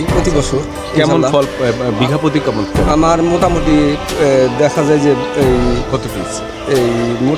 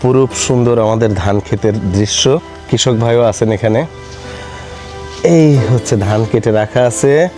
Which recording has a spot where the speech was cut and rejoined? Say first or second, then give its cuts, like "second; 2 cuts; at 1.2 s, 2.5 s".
second; 1 cut; at 2.6 s